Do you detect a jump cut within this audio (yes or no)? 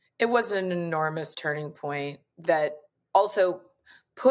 yes